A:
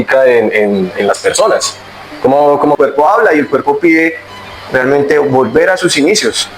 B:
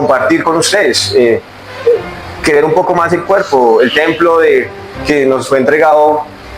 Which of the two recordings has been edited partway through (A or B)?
A